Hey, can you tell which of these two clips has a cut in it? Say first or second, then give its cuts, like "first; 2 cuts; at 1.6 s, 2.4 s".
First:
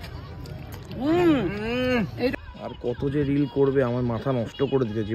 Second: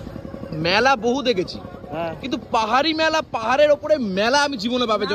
first; 1 cut; at 2.3 s